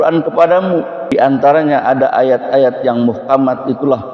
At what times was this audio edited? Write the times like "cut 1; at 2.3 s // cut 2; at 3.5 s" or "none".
cut 1; at 1.0 s